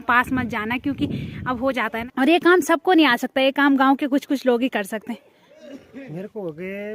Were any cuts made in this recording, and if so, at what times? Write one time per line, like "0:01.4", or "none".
0:02.0
0:05.5